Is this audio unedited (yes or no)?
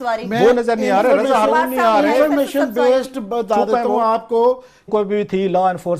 yes